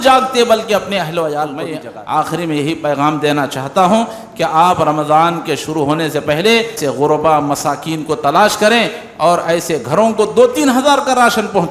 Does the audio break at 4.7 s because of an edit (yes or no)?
no